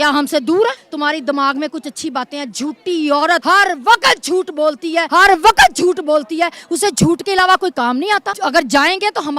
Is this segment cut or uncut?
cut